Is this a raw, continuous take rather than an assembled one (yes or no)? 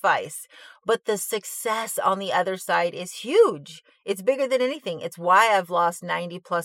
yes